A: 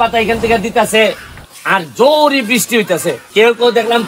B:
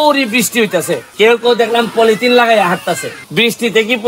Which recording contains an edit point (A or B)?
B